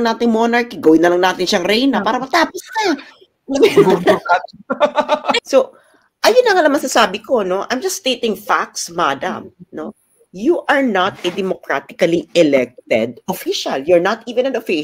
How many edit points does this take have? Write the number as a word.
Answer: one